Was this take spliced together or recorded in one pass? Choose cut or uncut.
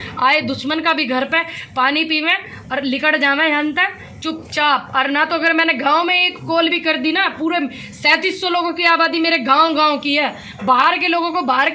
uncut